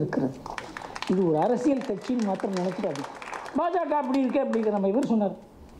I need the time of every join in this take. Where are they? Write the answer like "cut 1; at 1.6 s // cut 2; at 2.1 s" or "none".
none